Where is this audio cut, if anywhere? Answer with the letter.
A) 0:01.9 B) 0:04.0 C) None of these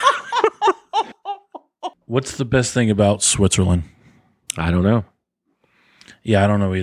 A